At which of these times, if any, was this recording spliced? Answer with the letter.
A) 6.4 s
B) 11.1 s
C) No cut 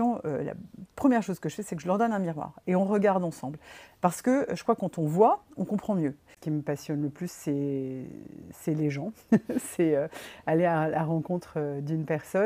A